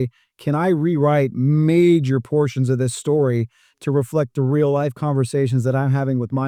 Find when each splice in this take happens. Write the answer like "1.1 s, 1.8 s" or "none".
none